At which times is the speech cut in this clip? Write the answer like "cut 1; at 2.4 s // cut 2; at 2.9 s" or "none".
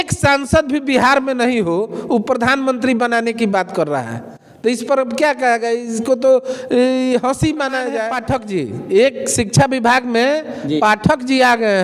cut 1; at 8.2 s

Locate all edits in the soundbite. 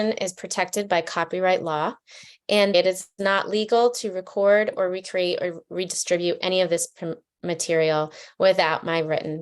cut 1; at 2.7 s

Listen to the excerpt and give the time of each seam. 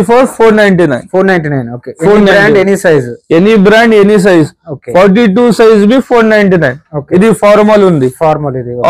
none

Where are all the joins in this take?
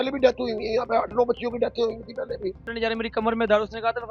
cut 1; at 2.7 s

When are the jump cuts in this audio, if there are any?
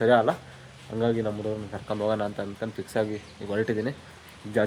none

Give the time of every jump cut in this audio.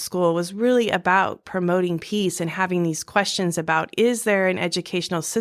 none

